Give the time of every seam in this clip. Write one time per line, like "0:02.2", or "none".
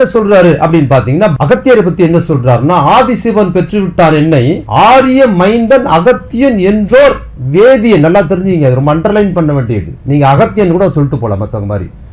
0:01.3
0:04.6

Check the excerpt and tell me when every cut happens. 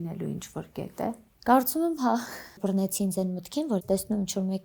0:01.3
0:02.6
0:03.8

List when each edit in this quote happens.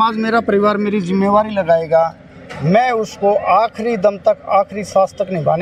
none

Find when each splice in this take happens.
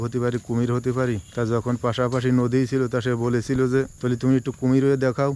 0:01.3
0:04.0

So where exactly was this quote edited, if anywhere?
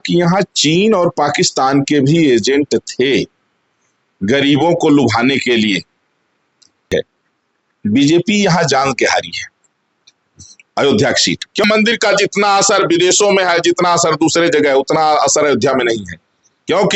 0:06.9
0:11.6

